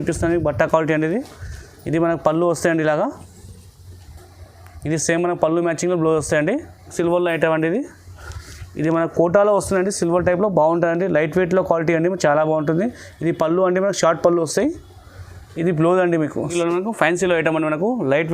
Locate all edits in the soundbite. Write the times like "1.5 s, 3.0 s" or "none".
6.9 s, 16.5 s